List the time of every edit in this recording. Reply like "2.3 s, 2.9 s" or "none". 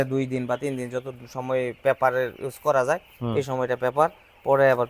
none